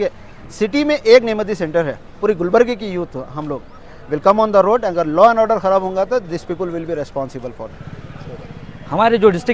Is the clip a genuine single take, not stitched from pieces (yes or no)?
no